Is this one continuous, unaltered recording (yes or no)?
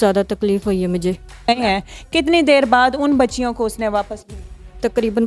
no